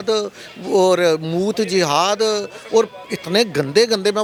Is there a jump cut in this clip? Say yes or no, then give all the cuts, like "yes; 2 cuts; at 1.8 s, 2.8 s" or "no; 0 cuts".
no; 0 cuts